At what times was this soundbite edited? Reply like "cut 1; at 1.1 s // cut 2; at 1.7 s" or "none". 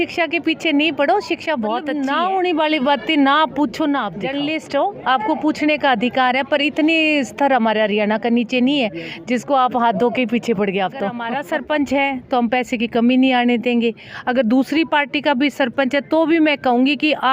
cut 1; at 1.9 s // cut 2; at 4.3 s // cut 3; at 11.3 s